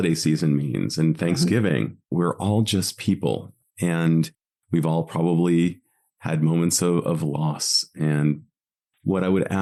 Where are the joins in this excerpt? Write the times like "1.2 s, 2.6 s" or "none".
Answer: none